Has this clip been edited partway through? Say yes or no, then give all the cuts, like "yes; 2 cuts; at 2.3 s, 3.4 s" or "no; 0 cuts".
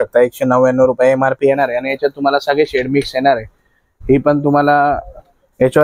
no; 0 cuts